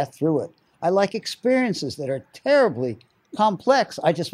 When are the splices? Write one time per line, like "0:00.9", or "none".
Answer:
none